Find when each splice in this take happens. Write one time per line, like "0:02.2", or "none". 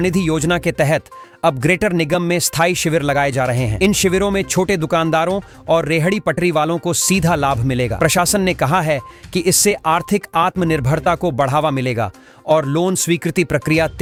none